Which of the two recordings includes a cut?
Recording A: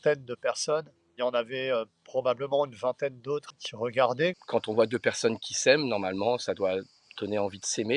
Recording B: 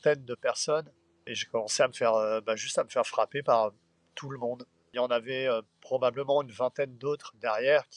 A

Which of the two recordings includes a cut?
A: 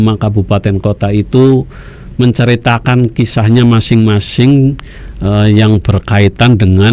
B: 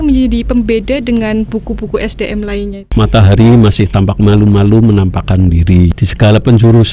B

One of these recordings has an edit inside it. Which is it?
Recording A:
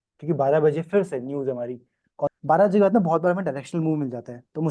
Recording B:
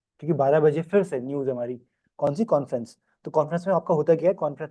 A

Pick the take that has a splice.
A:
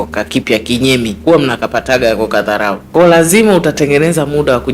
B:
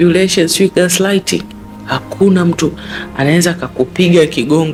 A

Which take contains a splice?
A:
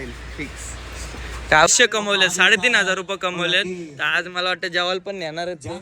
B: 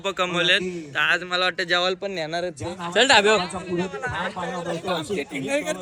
A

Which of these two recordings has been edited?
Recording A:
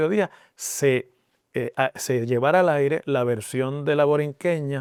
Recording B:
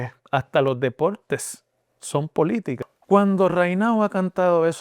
B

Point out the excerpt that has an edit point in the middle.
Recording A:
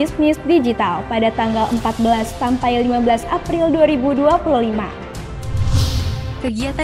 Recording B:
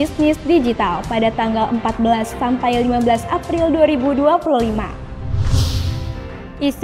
B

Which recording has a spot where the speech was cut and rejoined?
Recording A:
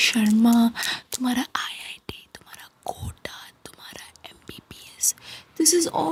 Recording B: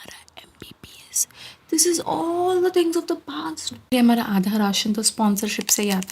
B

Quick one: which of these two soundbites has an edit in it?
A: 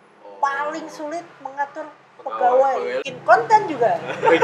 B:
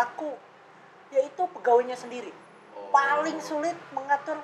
A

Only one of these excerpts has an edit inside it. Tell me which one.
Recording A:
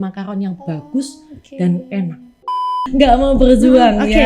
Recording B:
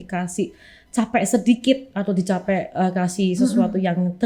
A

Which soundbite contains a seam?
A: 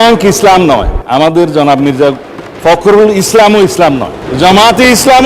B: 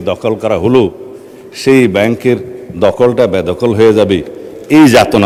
A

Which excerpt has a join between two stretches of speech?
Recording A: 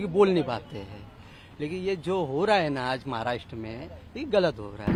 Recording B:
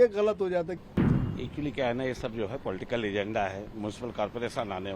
B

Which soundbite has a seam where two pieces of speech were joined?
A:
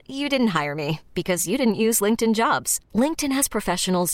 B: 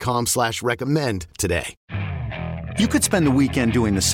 B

